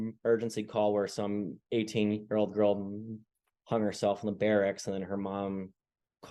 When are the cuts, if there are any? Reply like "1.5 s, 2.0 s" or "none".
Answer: none